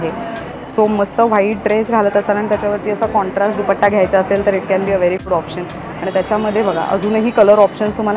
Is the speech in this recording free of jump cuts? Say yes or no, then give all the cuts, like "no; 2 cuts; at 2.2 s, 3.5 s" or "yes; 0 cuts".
yes; 0 cuts